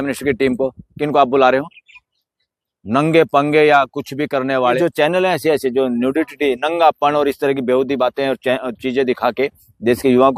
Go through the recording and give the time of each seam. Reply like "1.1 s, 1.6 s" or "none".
4.8 s